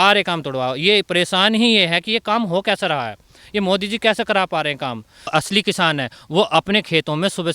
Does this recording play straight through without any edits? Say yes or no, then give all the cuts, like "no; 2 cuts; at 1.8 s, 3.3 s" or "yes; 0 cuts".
no; 1 cut; at 5.3 s